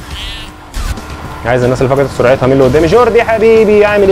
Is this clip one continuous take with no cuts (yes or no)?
no